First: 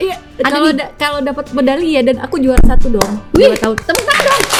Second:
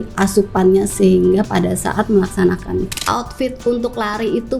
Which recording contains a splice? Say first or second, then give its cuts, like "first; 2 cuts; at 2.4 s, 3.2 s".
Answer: second; 1 cut; at 2.9 s